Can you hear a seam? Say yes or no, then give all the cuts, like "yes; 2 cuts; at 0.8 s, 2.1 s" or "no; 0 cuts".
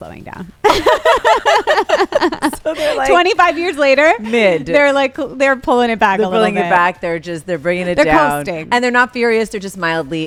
no; 0 cuts